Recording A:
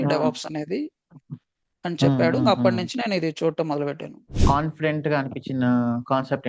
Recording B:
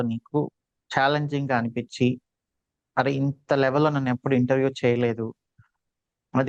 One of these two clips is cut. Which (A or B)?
A